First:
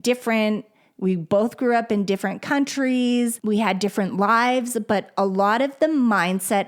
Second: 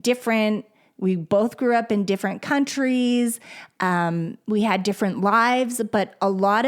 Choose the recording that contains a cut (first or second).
first